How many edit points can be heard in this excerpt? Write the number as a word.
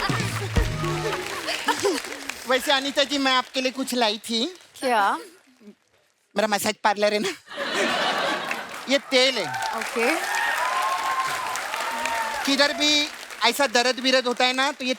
one